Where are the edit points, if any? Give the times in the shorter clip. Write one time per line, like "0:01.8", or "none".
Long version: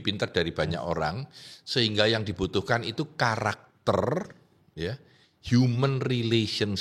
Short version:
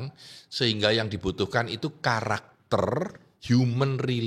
0:03.3

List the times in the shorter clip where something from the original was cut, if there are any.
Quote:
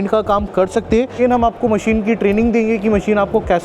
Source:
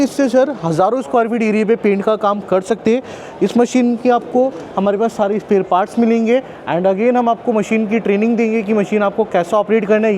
0:01.2

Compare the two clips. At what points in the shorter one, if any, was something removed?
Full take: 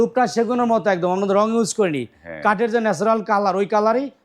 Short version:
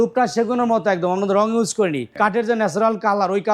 0:02.0

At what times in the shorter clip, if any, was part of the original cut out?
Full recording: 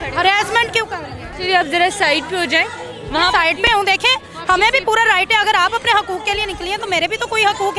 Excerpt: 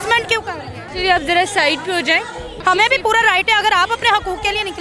0:02.5

